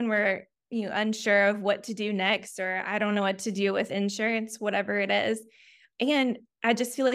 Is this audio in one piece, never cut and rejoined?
yes; 0 cuts

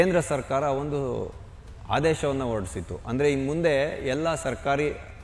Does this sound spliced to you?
no; 0 cuts

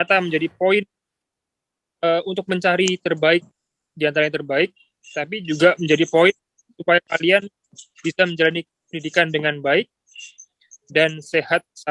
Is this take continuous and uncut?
yes; 0 cuts

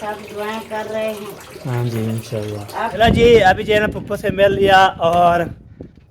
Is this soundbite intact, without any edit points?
no; 1 cut; at 2.9 s

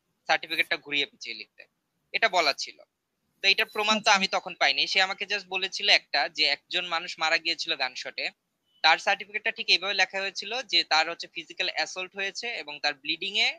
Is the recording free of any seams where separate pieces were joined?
yes; 0 cuts

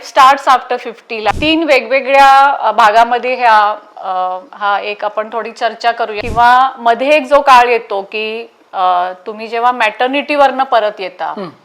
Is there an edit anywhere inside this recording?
yes; 2 cuts; at 1.3 s, 6.2 s

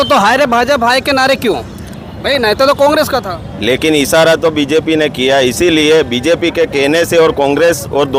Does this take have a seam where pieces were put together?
no; 0 cuts

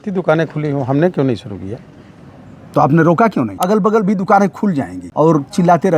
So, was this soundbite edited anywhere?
yes; 2 cuts; at 3.6 s, 5.0 s

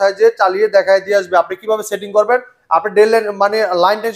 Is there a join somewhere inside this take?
no; 0 cuts

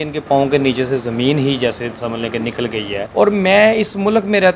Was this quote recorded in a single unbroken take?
no; 1 cut; at 3.0 s

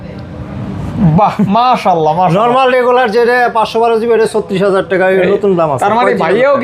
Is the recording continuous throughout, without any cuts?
yes; 0 cuts

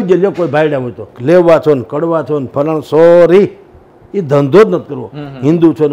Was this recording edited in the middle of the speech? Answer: yes; 1 cut; at 1.1 s

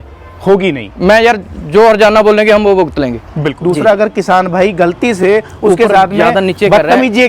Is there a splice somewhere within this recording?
yes; 1 cut; at 3.5 s

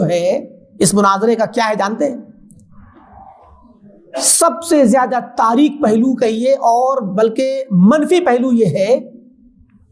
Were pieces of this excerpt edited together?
no; 0 cuts

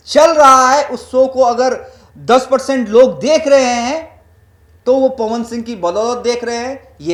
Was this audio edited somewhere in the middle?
no; 0 cuts

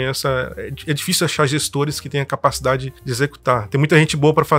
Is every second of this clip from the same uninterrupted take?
no; 1 cut; at 3.0 s

